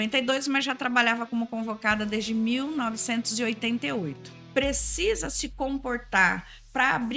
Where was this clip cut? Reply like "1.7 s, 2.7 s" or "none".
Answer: 4.3 s